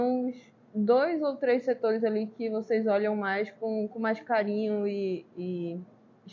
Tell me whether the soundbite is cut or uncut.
uncut